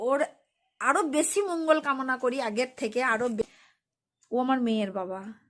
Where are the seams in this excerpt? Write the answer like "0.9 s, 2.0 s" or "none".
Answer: 3.4 s